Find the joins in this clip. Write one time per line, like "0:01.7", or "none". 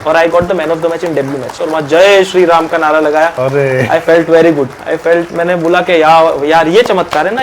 0:01.6